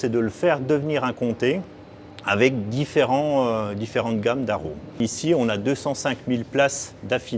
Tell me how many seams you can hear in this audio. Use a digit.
1